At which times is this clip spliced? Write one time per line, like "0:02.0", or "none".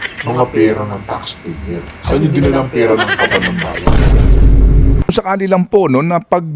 0:05.1